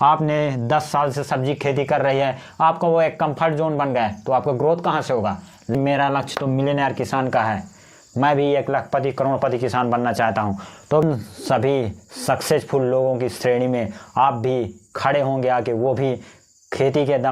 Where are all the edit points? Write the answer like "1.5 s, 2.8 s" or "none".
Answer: 5.7 s, 11.0 s